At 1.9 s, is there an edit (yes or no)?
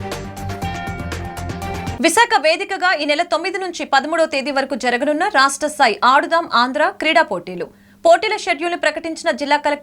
yes